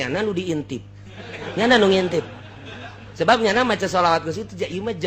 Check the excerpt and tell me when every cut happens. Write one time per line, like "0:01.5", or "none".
none